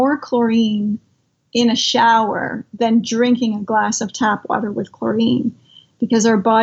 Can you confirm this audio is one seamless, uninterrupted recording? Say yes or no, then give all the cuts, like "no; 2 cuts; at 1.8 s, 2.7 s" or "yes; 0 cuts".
yes; 0 cuts